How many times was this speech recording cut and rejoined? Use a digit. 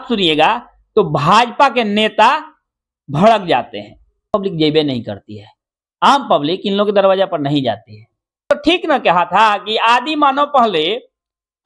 2